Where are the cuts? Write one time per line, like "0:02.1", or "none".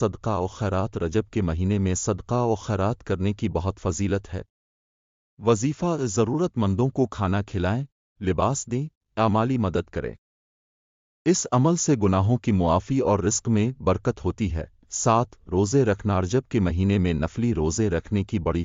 0:15.2